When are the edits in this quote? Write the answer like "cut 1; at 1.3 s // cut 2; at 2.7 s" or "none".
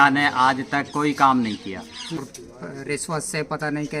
cut 1; at 2.2 s

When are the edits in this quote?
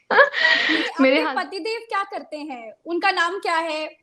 cut 1; at 1.3 s

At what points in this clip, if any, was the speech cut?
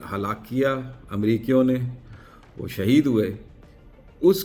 none

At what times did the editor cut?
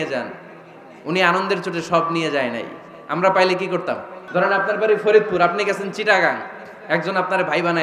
cut 1; at 4.1 s

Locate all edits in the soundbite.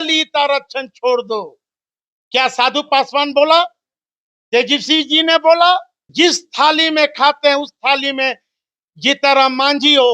cut 1; at 6.0 s

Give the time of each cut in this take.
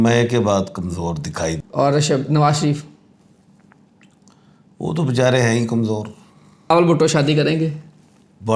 cut 1; at 1.6 s // cut 2; at 6.7 s

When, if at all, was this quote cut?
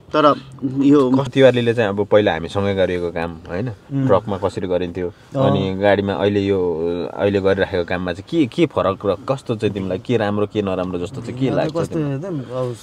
cut 1; at 1.3 s

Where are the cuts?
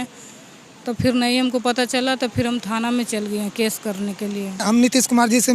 cut 1; at 4.6 s

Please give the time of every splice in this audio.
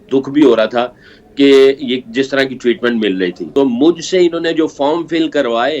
cut 1; at 3.4 s

